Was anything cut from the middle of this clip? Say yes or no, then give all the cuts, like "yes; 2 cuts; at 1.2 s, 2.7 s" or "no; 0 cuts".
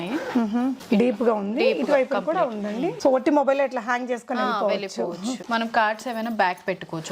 yes; 2 cuts; at 3.0 s, 5.4 s